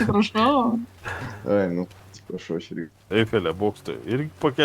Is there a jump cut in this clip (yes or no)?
yes